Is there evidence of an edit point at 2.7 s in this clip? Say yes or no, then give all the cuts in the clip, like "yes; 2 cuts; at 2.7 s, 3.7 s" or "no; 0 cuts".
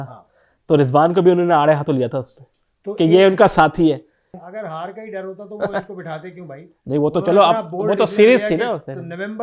no; 1 cut; at 4.4 s